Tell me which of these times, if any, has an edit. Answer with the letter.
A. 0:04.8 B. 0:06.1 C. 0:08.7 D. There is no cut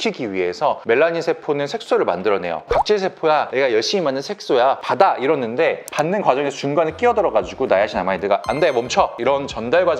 D